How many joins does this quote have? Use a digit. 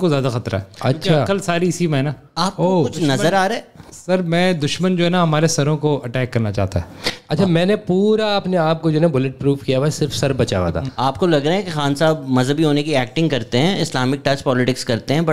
0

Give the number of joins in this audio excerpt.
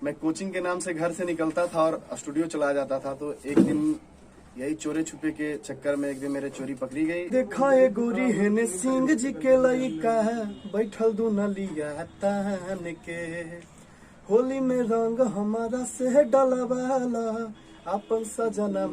1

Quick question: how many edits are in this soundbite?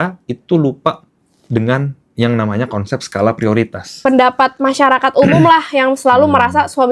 1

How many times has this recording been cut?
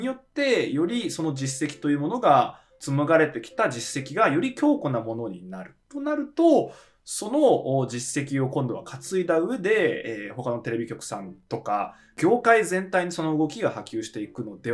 2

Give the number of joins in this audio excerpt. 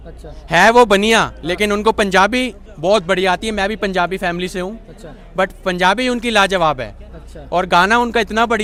0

